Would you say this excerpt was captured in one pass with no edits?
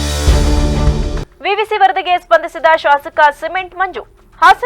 no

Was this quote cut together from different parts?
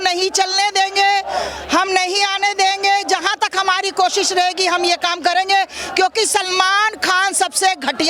no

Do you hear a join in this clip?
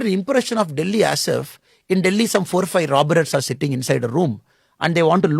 no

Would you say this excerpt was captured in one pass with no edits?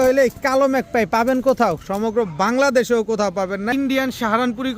no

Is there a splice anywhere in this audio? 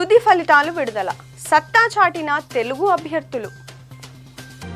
no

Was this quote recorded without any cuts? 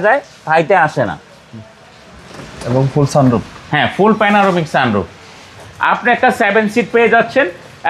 no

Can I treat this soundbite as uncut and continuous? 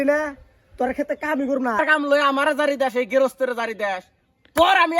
no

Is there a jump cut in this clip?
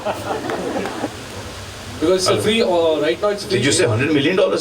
yes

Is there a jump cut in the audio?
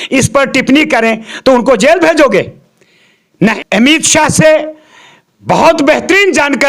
yes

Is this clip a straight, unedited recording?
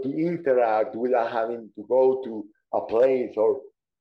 yes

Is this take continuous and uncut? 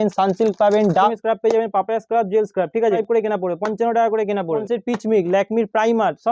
no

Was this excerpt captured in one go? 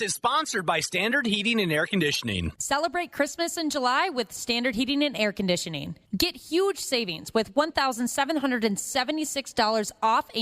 no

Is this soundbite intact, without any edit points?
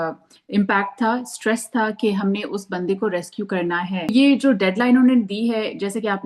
no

